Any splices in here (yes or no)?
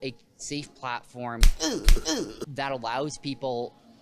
no